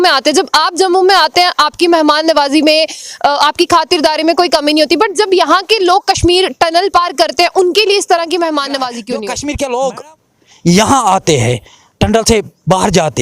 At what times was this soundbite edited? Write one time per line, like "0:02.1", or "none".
0:09.1